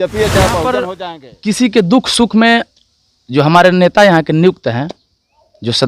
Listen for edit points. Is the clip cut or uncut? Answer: cut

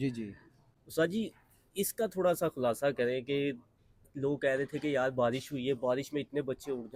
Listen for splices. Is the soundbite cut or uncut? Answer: uncut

